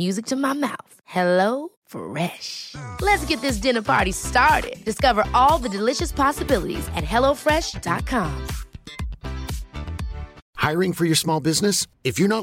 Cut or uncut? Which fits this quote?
cut